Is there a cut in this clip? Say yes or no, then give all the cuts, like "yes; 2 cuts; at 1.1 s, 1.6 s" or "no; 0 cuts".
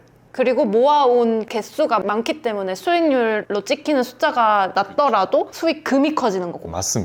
yes; 3 cuts; at 1.5 s, 3.4 s, 4.7 s